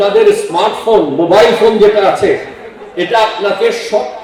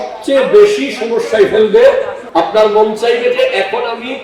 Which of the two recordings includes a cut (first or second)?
second